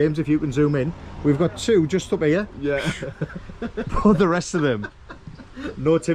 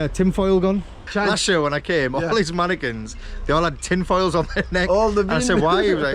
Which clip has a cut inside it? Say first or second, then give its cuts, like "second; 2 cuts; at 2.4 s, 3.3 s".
second; 1 cut; at 1.1 s